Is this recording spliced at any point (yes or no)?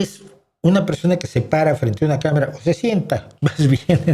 no